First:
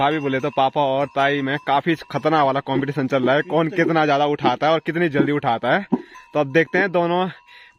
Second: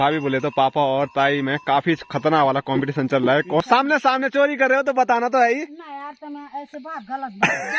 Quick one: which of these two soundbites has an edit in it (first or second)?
second